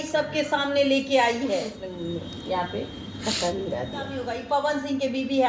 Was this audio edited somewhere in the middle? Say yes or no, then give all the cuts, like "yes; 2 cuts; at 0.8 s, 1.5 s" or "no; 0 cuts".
yes; 2 cuts; at 1.9 s, 4.3 s